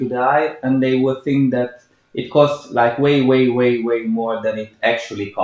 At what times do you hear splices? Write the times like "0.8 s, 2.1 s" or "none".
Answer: none